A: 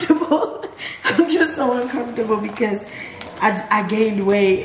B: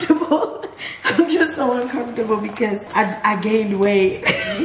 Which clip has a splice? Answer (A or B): B